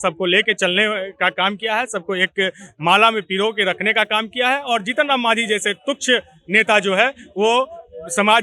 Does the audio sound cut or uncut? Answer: uncut